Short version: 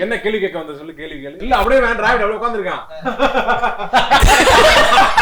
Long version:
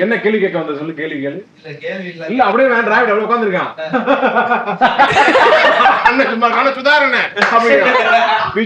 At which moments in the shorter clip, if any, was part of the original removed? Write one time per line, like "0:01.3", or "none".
0:01.4